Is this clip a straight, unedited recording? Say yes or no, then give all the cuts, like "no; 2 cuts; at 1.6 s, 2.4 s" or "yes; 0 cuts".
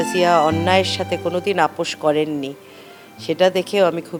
yes; 0 cuts